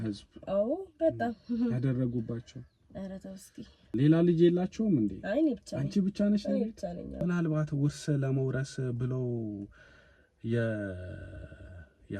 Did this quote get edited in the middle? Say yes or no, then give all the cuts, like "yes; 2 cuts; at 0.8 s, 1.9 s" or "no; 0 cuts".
yes; 2 cuts; at 3.9 s, 7.2 s